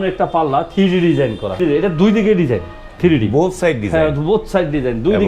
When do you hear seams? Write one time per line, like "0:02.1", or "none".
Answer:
0:01.6